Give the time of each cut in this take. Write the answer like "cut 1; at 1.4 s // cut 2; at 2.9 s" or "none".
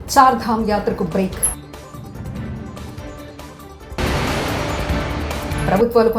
cut 1; at 1.6 s // cut 2; at 3.9 s